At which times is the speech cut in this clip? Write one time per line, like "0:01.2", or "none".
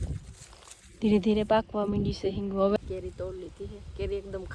0:02.8

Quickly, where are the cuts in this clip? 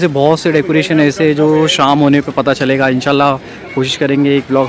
none

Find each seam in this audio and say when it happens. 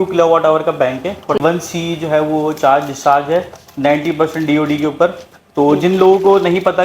0:01.4

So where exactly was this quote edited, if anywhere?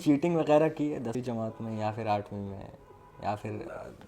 0:01.1

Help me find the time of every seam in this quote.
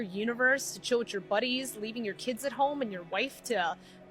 0:02.1
0:03.0

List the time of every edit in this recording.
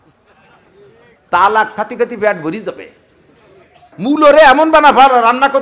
0:03.9

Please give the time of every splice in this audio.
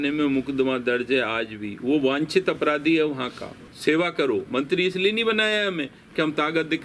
0:03.6

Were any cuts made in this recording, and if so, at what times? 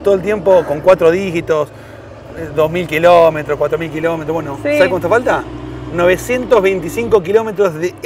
none

